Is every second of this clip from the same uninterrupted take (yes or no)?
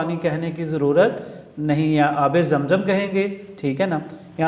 yes